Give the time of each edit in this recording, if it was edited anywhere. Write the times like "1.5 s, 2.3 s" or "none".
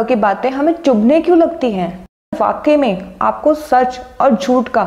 2.4 s